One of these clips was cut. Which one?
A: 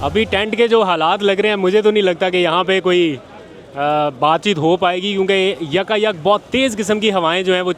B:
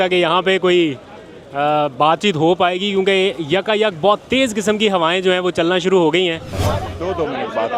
B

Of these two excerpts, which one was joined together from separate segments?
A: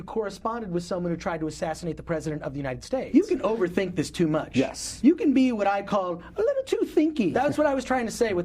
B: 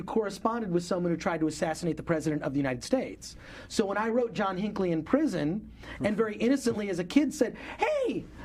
A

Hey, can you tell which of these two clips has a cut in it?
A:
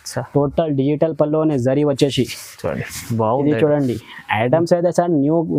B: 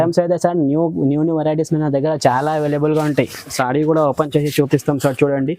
B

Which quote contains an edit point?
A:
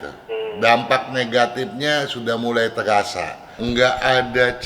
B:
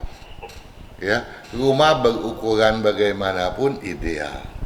A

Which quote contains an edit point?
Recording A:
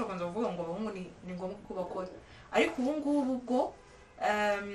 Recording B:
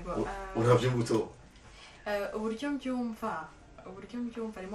B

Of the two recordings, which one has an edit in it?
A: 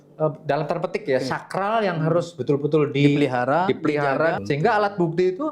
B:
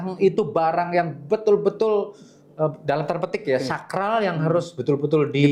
A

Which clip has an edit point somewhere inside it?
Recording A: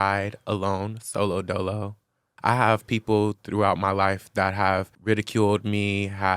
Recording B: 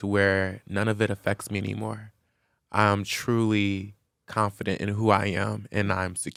A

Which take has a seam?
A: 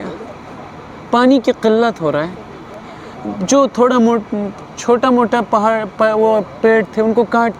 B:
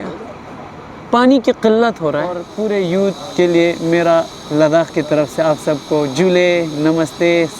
B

